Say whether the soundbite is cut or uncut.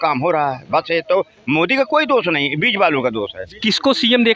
cut